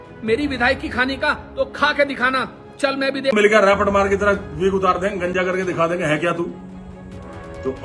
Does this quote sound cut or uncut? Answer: cut